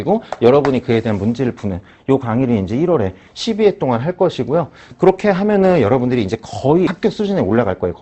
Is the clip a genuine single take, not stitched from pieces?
no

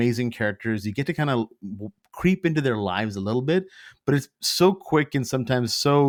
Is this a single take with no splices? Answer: yes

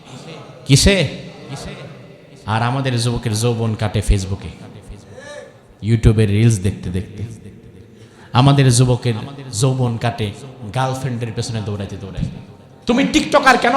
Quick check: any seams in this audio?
yes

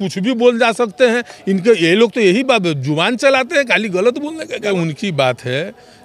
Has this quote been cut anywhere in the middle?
yes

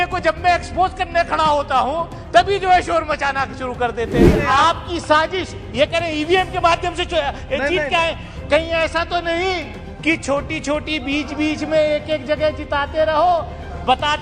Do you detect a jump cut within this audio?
yes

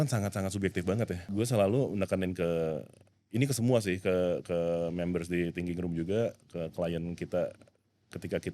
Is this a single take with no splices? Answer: no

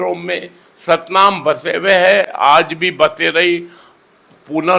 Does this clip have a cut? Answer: no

